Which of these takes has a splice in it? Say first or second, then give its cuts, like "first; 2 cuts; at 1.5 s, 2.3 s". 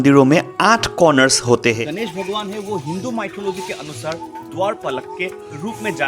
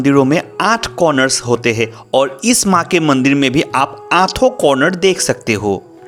first; 1 cut; at 1.9 s